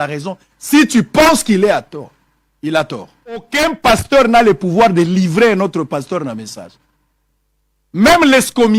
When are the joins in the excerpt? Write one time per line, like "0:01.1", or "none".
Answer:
0:03.5